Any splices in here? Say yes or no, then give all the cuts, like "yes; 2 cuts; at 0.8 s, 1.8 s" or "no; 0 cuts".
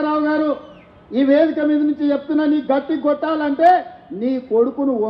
no; 0 cuts